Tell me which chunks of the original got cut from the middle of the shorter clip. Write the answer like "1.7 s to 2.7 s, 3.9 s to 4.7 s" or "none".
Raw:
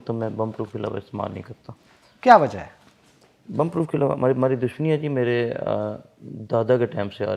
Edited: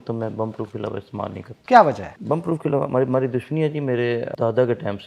1.5 s to 2.0 s, 2.7 s to 3.4 s, 5.6 s to 6.4 s